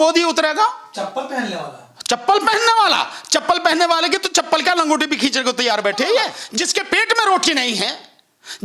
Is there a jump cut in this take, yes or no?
yes